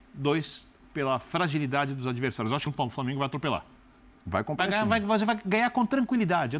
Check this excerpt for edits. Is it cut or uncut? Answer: cut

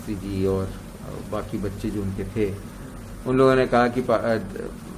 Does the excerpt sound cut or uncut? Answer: uncut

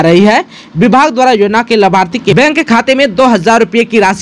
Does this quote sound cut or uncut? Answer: cut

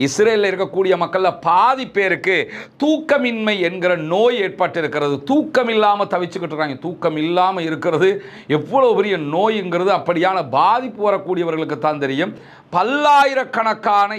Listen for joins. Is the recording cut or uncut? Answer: cut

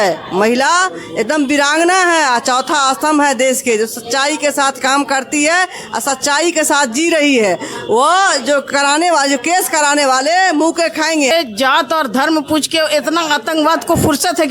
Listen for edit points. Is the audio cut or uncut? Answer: cut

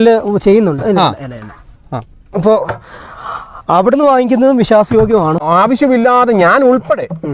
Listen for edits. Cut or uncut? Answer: cut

